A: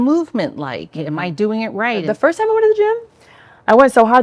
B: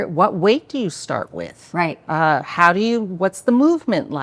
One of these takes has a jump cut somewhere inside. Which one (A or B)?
A